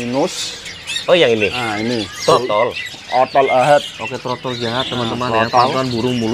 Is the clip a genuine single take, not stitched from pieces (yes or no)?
yes